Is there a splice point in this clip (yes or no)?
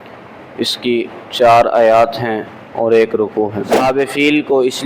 yes